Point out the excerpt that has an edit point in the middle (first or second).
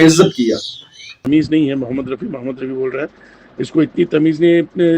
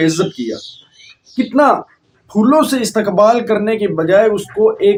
first